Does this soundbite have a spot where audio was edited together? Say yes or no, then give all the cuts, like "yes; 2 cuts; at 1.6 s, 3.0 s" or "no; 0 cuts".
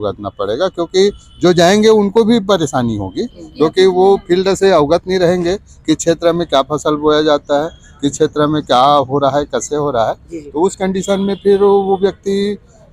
no; 0 cuts